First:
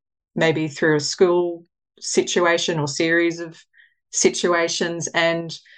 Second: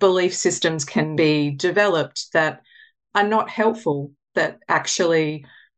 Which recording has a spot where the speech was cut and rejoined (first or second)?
second